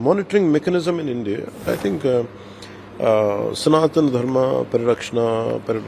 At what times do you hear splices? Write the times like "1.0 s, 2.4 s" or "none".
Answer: 1.7 s